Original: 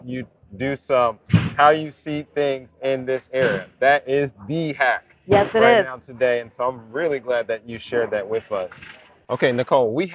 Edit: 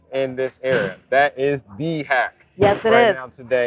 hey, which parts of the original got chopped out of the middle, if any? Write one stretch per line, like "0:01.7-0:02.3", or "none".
none